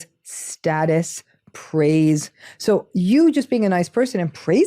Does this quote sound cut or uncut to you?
uncut